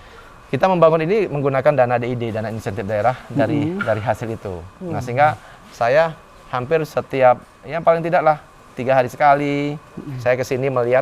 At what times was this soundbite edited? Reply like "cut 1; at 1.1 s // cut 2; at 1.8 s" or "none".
none

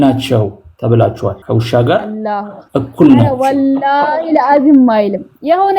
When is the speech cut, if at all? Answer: cut 1; at 1.4 s

